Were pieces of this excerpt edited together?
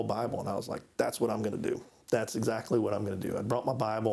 no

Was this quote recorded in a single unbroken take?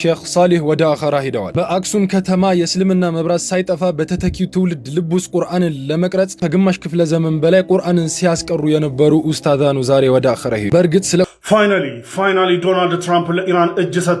no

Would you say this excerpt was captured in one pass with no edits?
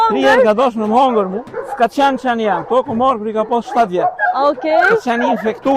no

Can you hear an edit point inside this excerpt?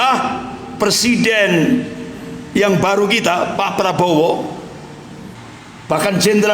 yes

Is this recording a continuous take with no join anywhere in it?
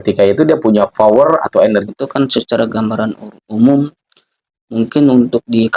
no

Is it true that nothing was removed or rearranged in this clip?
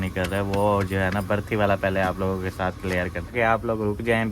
no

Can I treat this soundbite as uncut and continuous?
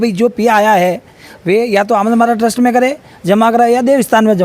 yes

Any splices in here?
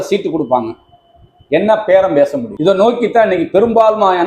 yes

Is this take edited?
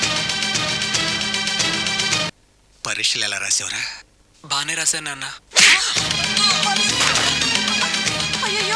yes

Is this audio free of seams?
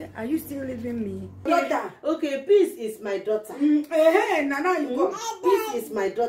no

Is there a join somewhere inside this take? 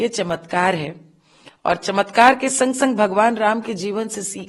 no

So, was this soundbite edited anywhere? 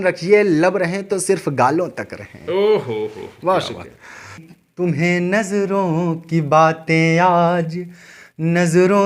no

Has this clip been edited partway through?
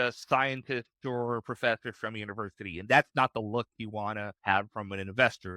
yes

